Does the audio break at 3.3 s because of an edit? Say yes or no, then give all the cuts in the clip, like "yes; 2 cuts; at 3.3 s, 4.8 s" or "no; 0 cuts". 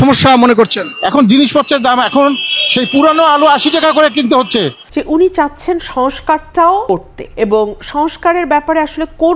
no; 2 cuts; at 4.8 s, 7.0 s